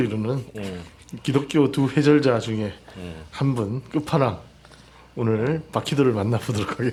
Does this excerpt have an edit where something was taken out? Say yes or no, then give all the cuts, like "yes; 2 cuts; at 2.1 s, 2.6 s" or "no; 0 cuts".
no; 0 cuts